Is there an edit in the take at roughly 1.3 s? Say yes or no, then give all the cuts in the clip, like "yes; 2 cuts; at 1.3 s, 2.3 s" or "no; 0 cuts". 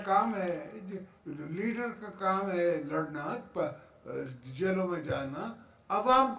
no; 0 cuts